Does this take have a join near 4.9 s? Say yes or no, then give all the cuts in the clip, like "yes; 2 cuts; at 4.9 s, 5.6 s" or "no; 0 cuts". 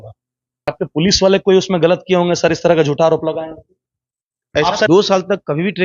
yes; 2 cuts; at 0.7 s, 4.9 s